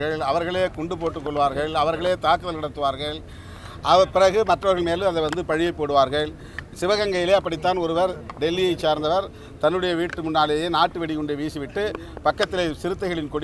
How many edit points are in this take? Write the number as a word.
zero